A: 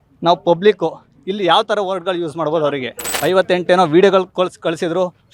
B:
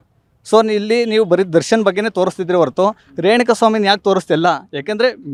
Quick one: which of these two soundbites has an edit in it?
A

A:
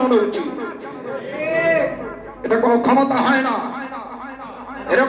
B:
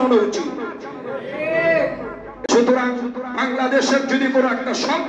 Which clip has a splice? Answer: B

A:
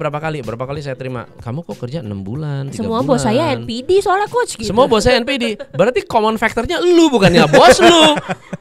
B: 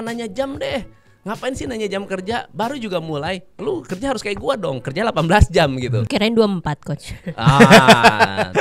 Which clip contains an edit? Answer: B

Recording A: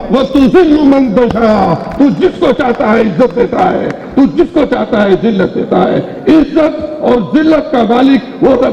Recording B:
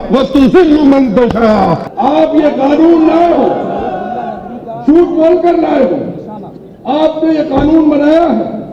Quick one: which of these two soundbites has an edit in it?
B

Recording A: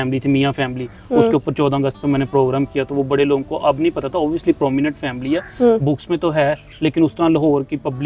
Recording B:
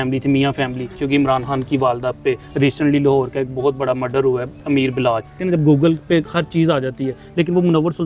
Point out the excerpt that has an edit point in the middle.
B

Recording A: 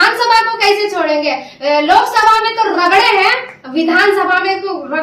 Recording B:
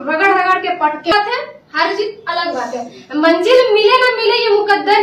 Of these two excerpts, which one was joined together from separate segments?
B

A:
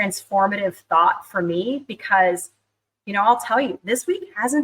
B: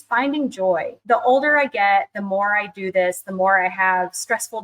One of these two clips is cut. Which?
B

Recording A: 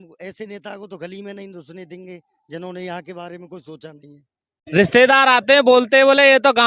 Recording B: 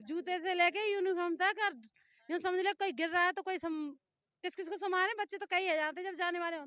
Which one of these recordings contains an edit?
A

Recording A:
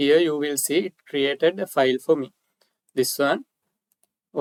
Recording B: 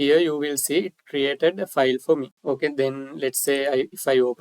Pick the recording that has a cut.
B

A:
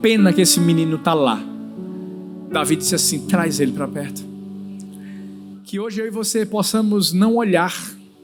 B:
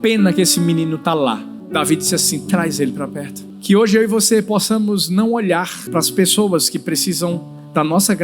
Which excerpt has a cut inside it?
B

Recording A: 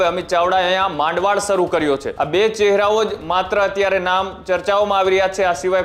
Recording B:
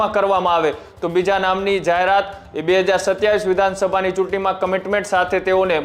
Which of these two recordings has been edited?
A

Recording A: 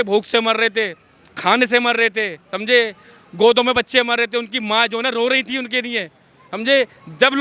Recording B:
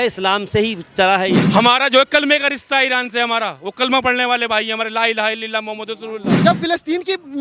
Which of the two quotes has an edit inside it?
B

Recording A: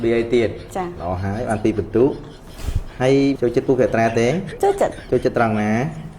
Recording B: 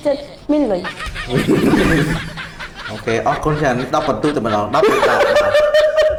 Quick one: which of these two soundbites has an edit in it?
A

